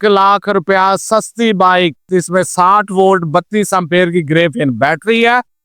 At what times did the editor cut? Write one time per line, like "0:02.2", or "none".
0:02.0